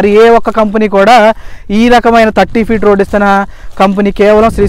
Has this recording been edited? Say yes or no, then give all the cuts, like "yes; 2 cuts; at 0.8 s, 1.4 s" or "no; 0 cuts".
no; 0 cuts